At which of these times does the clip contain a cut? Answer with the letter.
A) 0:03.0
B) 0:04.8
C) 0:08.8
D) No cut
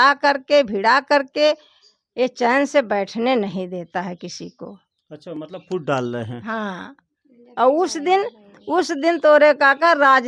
D